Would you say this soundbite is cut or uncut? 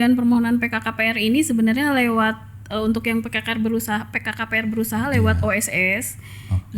uncut